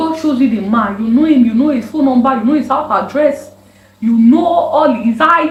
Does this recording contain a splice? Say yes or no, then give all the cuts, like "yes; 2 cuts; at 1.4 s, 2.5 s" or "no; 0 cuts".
no; 0 cuts